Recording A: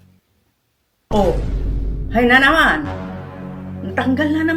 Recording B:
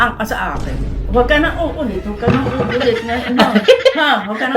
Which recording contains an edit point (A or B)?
B